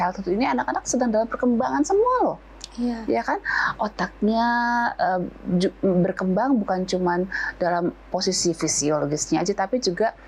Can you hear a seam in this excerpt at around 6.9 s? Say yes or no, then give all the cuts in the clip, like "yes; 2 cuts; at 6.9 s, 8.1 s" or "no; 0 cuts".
no; 0 cuts